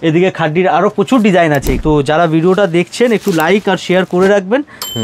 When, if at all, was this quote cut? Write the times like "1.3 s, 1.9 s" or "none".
1.7 s